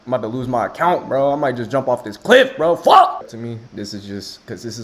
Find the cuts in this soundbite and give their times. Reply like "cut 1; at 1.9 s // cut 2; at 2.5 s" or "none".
cut 1; at 3.3 s